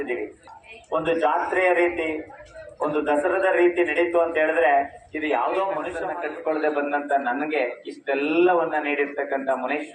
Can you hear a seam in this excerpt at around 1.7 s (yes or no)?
no